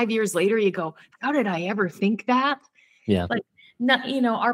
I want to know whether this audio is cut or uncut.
uncut